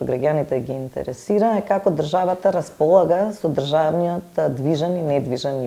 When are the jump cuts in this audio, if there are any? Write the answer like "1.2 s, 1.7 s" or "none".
none